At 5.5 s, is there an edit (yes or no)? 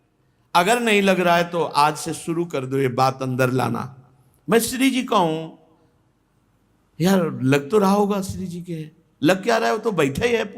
no